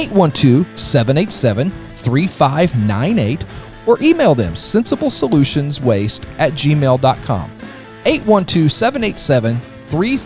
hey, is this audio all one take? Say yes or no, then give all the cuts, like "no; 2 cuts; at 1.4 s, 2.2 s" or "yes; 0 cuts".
yes; 0 cuts